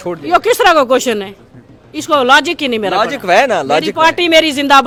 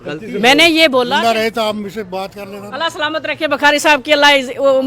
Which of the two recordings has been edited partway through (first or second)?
second